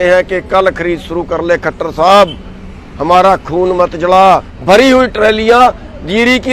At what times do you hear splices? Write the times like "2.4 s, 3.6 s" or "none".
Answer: 4.5 s